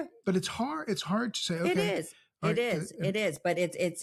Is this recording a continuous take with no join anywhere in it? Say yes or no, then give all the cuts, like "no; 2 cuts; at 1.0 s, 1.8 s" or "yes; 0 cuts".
yes; 0 cuts